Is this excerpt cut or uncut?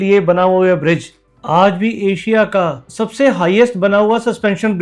uncut